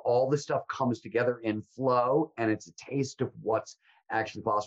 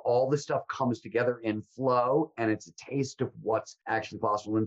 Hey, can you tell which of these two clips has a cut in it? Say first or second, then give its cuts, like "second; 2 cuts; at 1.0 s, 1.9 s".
second; 1 cut; at 3.7 s